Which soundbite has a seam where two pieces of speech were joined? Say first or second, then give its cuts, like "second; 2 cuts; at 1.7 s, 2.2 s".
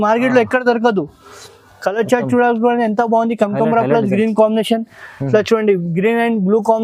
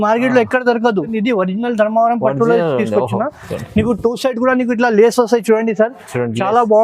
second; 1 cut; at 1.1 s